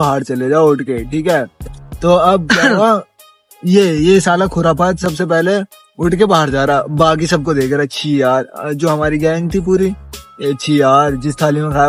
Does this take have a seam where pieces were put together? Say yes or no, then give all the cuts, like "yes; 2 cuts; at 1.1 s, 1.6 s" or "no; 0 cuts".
no; 0 cuts